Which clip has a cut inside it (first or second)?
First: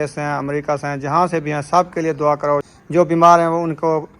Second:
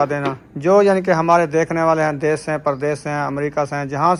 first